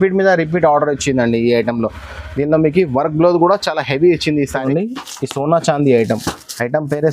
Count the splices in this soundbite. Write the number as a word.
one